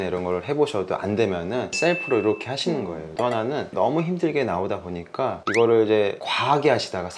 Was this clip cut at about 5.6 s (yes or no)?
no